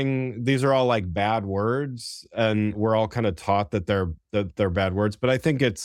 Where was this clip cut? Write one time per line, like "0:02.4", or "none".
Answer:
0:02.8